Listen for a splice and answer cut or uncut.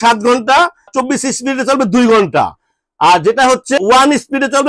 uncut